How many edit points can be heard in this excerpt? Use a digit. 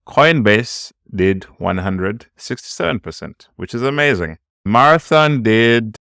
1